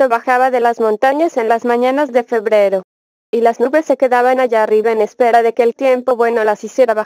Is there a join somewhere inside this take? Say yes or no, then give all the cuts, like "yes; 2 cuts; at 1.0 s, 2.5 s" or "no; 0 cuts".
no; 0 cuts